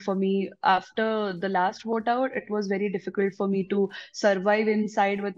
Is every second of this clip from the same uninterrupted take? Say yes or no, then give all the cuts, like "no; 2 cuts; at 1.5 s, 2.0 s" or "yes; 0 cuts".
yes; 0 cuts